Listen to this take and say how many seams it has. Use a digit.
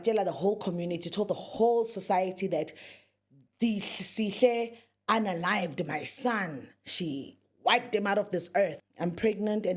1